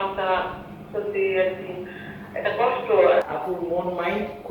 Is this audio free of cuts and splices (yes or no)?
no